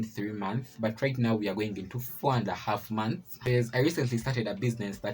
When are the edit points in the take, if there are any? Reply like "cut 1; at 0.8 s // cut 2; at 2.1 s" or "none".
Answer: cut 1; at 3.4 s